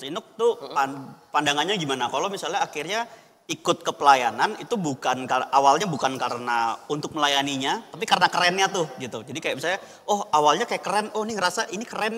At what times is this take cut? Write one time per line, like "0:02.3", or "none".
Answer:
none